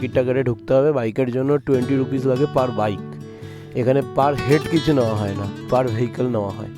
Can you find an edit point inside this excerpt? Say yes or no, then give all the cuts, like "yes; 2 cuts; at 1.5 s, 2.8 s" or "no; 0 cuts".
no; 0 cuts